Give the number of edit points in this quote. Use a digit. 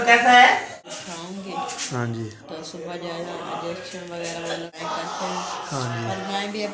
2